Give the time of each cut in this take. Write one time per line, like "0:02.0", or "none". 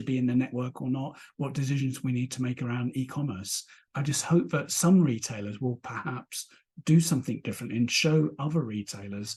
none